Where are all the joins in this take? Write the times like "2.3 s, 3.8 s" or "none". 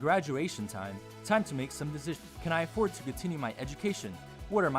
2.3 s